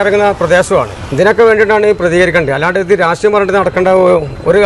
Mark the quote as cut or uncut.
uncut